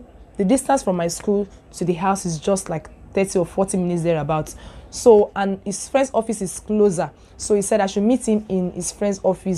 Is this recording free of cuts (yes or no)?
yes